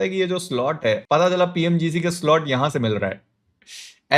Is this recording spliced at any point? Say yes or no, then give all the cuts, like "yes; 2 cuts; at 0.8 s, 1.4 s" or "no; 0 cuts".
no; 0 cuts